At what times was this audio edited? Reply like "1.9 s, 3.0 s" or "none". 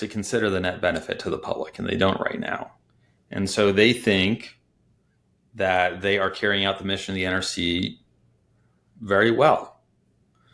none